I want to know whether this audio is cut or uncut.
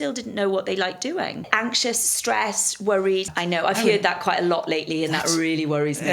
cut